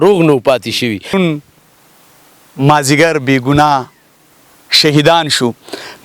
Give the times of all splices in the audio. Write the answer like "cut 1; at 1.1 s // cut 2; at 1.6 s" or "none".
cut 1; at 1.1 s